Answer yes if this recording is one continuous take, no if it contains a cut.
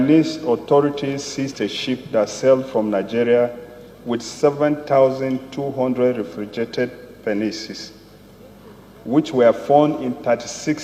yes